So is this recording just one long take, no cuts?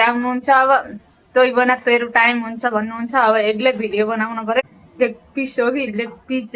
no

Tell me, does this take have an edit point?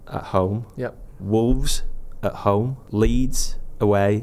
yes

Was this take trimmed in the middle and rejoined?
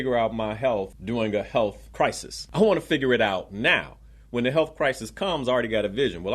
yes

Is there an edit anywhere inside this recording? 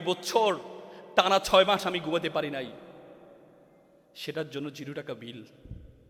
no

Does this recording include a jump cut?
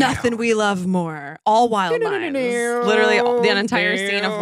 no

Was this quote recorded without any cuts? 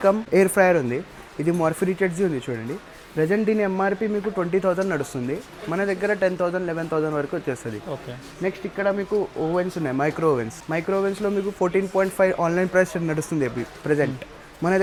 yes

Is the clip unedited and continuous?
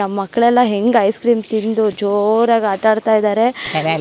yes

